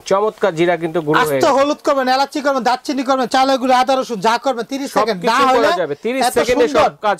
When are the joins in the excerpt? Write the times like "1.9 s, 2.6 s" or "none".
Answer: none

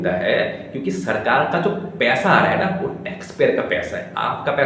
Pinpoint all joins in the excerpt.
none

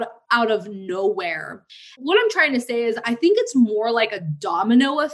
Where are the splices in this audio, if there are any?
1.8 s, 3.1 s

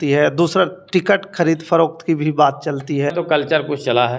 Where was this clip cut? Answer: none

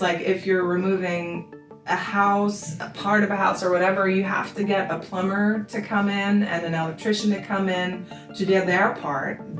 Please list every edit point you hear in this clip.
none

